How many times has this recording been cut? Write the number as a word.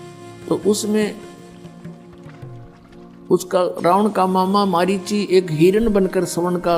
two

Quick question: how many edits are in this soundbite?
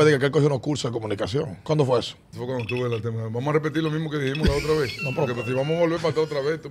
two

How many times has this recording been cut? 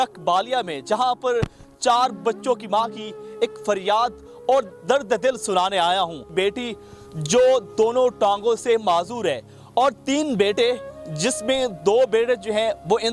one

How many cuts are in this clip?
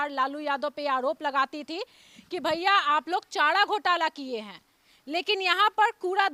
zero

